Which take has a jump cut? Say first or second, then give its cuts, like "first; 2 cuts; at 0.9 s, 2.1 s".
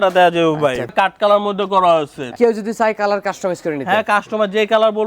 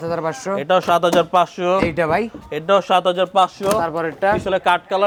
first; 2 cuts; at 0.9 s, 2.3 s